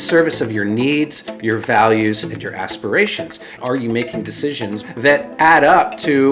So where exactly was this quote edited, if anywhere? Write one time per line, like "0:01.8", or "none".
0:03.5
0:04.8